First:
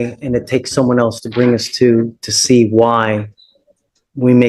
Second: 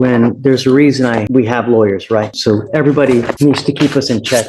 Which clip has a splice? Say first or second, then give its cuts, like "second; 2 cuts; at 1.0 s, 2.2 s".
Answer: second; 3 cuts; at 1.3 s, 2.3 s, 3.3 s